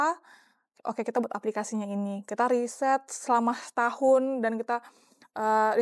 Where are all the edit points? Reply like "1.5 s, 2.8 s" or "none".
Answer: none